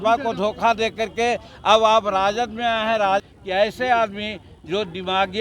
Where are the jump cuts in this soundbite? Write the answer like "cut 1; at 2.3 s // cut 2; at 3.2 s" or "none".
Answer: cut 1; at 3.2 s